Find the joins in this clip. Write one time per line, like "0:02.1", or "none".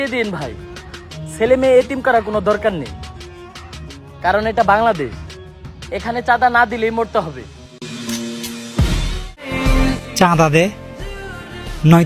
0:09.5